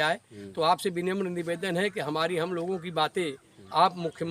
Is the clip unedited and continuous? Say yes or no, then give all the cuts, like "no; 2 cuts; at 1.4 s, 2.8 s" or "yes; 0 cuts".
yes; 0 cuts